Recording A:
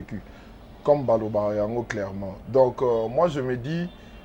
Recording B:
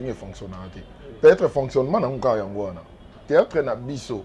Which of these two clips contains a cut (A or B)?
B